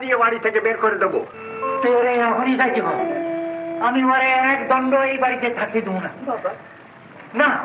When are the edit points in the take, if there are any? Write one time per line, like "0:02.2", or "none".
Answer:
0:01.4